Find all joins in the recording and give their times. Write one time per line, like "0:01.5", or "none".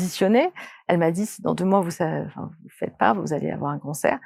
none